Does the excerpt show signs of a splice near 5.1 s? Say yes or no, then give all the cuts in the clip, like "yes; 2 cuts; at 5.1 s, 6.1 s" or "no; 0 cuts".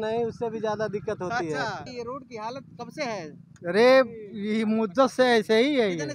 no; 1 cut; at 1.9 s